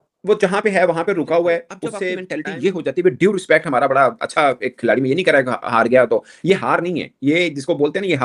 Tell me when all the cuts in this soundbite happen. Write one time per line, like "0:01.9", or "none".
0:02.1